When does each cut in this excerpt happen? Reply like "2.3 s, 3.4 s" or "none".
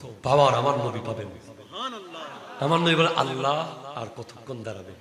3.9 s